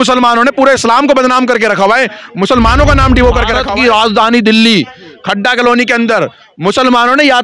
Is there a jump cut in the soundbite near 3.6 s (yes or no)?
yes